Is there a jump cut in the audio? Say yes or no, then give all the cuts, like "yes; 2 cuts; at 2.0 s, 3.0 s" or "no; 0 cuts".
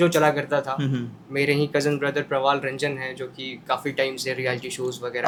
no; 0 cuts